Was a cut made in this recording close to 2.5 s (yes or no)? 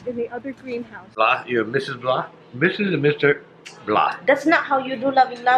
no